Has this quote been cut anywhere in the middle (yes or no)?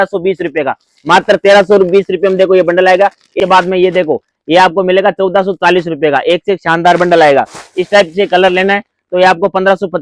yes